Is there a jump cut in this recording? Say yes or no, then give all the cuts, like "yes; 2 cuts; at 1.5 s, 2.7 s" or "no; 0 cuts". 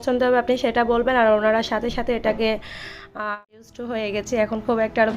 yes; 1 cut; at 3.7 s